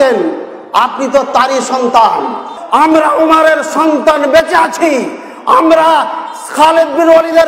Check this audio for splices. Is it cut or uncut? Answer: cut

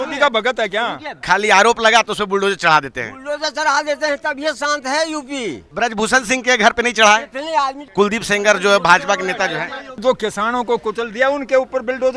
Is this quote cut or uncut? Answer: cut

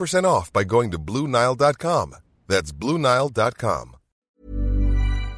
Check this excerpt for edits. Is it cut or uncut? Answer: cut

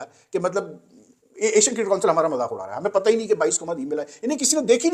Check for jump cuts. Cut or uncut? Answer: uncut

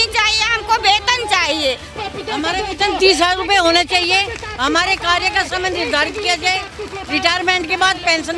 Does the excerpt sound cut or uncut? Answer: cut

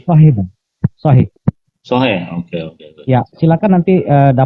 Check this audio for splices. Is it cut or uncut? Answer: cut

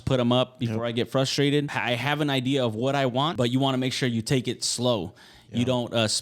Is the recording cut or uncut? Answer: cut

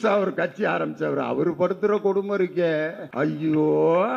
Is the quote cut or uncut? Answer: cut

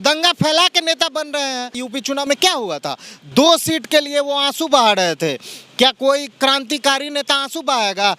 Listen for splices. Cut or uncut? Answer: cut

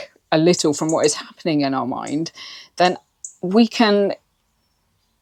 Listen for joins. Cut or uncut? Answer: uncut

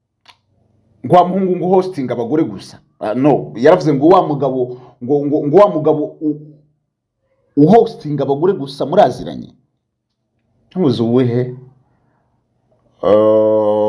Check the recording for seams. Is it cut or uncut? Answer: uncut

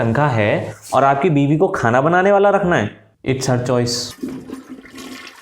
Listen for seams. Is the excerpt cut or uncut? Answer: cut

